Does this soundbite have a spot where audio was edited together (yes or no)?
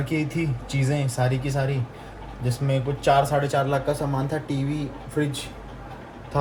no